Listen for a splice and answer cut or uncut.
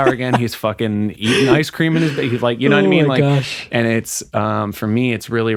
uncut